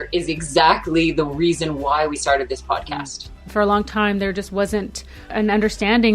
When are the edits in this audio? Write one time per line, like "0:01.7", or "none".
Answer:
0:03.5
0:05.2